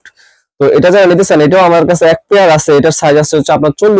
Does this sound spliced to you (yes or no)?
no